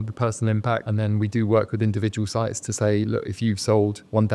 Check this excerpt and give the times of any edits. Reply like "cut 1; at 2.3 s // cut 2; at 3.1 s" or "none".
none